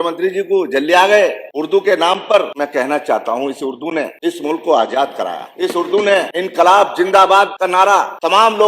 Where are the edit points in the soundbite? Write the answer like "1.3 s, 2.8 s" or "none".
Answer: 1.5 s, 2.5 s, 4.1 s, 5.4 s, 6.3 s, 7.8 s

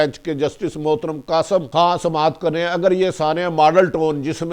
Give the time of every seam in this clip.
1.7 s

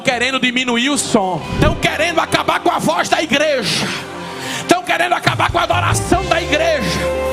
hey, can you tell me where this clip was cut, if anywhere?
1.5 s

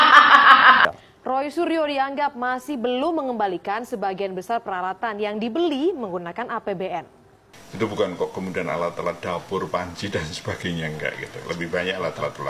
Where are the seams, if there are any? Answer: 0.9 s, 7.3 s

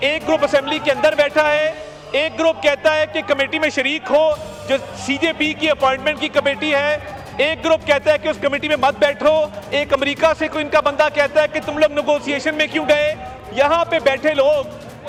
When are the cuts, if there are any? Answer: none

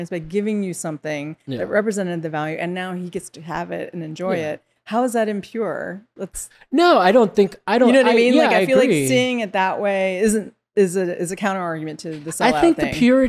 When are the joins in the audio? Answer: none

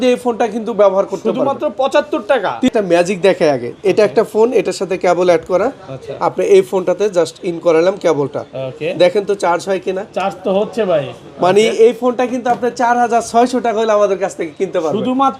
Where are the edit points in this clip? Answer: 2.7 s

